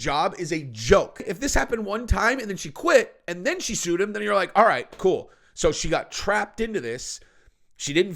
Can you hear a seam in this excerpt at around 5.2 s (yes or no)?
no